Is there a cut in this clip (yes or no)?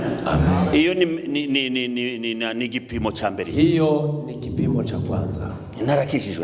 no